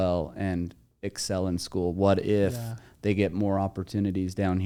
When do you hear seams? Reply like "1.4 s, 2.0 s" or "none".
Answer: none